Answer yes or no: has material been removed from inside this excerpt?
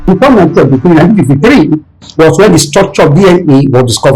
no